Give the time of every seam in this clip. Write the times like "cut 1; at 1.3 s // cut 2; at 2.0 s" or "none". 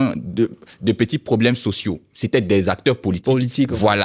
none